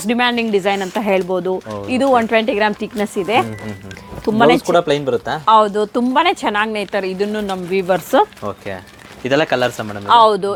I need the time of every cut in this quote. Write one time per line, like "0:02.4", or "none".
none